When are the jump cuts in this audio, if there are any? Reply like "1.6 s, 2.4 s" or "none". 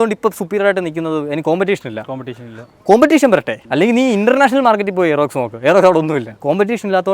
none